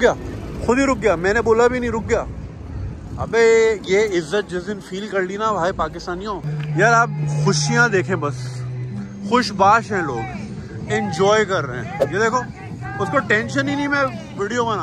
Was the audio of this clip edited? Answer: yes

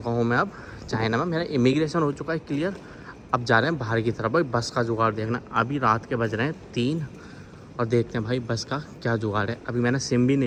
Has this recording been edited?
no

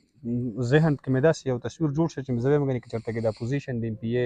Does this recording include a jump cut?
no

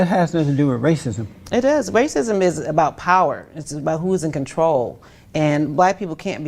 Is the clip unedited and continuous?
no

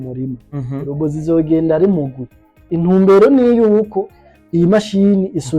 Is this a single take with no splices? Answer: no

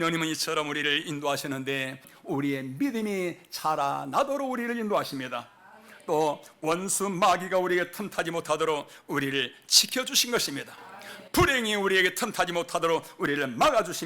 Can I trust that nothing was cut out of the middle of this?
no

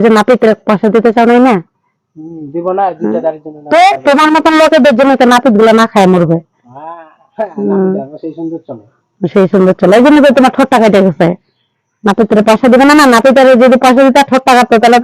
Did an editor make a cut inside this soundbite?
no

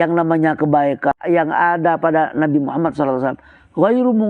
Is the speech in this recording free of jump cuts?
no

